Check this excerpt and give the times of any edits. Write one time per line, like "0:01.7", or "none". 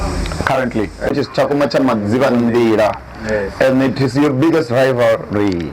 0:01.1